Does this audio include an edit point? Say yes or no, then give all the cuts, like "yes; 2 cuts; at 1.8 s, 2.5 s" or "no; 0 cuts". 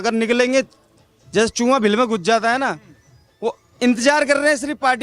no; 0 cuts